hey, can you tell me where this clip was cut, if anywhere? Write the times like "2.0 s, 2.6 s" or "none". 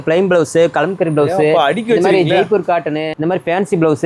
none